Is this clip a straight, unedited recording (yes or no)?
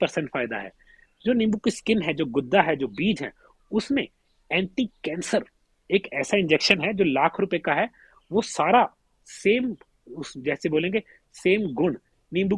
yes